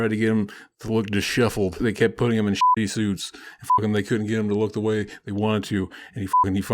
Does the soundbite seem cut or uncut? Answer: cut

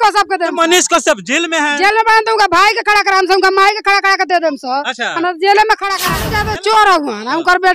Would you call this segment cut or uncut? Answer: cut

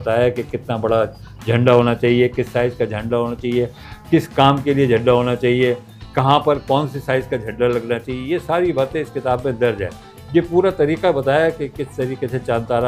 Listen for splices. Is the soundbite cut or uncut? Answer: uncut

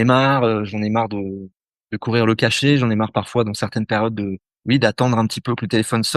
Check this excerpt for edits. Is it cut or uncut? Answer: cut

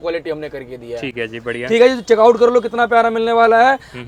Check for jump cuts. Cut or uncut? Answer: uncut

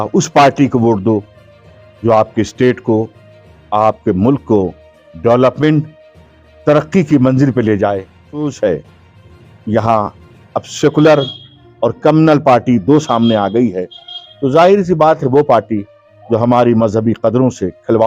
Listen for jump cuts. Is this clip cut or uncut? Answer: cut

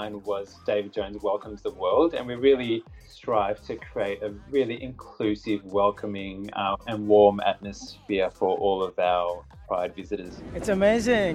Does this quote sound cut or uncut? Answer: uncut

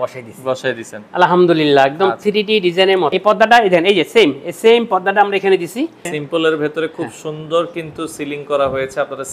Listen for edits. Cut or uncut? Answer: cut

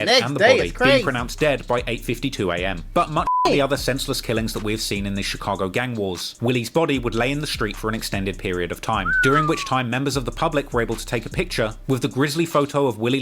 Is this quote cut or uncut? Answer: uncut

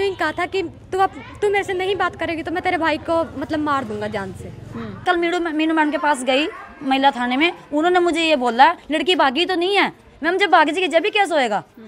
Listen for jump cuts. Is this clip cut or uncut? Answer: cut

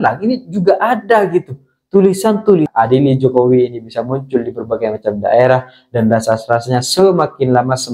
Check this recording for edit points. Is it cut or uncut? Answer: cut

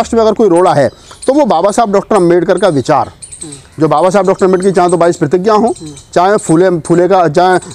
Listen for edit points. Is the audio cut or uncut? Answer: uncut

